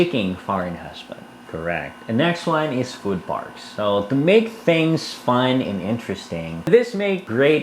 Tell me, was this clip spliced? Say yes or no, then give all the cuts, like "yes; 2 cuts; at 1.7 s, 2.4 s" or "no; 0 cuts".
yes; 2 cuts; at 1.5 s, 6.7 s